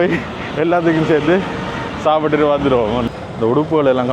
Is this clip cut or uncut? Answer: cut